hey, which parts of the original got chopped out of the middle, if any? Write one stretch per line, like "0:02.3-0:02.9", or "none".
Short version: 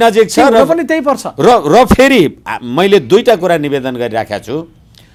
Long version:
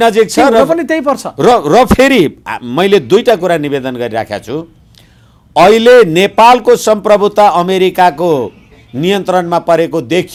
none